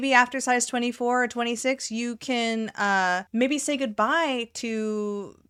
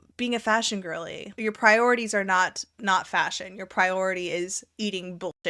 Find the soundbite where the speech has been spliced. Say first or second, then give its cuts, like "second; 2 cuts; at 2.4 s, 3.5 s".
second; 1 cut; at 1.3 s